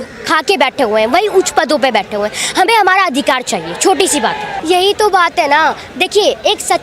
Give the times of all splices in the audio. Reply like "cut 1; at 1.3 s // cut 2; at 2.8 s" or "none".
cut 1; at 4.5 s

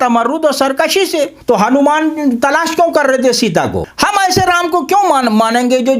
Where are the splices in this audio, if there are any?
cut 1; at 1.4 s // cut 2; at 3.9 s

